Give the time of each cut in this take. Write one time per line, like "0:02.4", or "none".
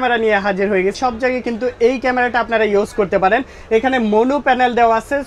0:01.0